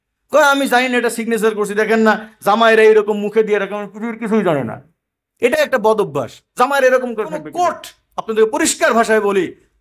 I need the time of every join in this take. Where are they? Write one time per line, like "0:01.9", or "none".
0:07.5